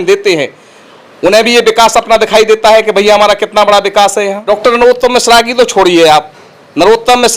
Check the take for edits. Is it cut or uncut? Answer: cut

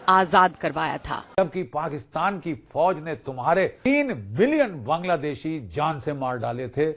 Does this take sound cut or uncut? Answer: cut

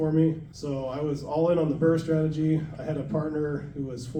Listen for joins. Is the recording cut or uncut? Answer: uncut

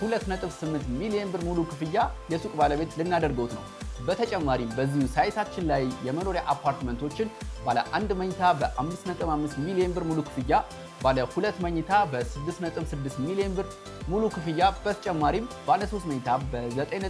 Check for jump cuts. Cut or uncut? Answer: uncut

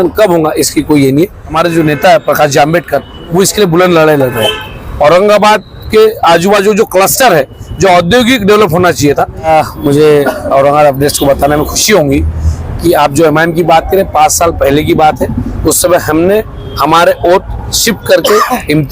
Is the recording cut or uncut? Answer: cut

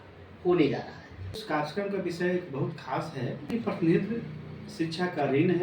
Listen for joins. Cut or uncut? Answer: cut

